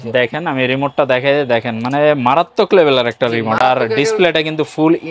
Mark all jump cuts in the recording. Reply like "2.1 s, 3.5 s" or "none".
none